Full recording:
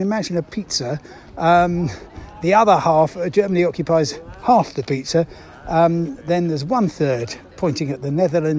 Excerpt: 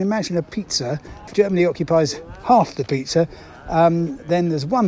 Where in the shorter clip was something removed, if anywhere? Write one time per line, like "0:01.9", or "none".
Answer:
0:01.2